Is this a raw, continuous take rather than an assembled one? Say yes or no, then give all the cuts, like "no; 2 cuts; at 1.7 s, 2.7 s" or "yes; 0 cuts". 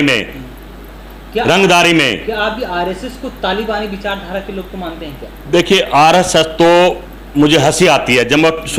yes; 0 cuts